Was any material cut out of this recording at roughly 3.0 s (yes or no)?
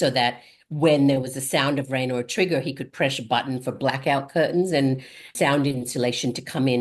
no